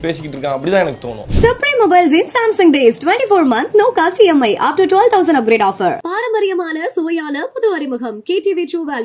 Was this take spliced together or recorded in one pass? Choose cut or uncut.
cut